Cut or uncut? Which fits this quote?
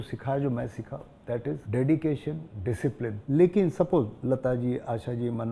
cut